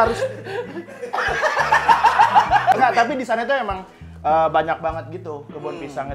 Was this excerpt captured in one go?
no; 1 cut; at 2.8 s

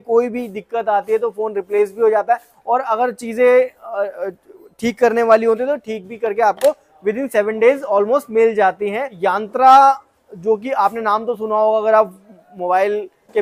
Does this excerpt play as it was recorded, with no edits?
no; 1 cut; at 9.2 s

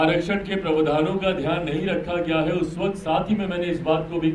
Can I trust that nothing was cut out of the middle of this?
yes; 0 cuts

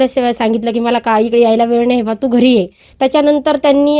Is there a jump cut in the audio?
yes; 1 cut; at 2.8 s

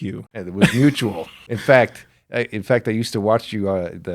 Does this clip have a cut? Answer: yes; 1 cut; at 1.4 s

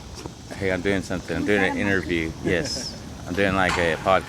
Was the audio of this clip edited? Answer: no; 0 cuts

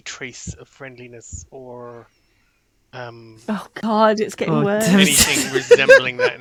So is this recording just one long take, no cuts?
yes; 0 cuts

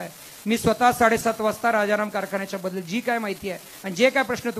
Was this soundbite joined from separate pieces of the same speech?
no; 0 cuts

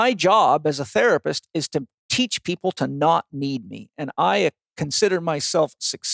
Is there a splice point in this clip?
no; 0 cuts

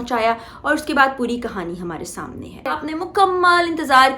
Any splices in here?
yes; 1 cut; at 2.8 s

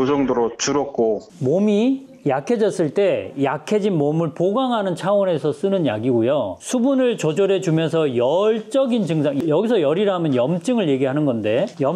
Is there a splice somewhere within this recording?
yes; 2 cuts; at 1.3 s, 6.6 s

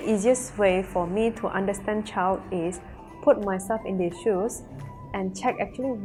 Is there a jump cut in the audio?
no; 0 cuts

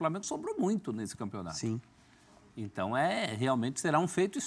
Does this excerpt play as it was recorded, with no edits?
yes; 0 cuts

